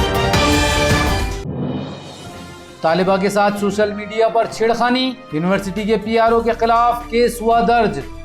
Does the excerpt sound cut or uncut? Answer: cut